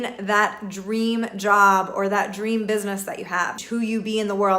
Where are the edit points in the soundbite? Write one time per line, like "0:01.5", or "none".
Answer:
0:03.6